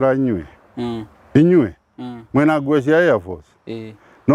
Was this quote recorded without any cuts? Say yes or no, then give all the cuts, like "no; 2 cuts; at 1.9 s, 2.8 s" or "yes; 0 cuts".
yes; 0 cuts